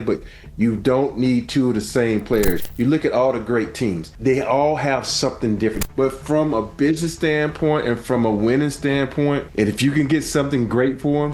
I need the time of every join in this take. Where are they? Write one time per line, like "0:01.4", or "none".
0:02.6
0:04.1
0:05.8